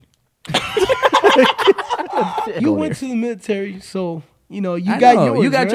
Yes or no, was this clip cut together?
yes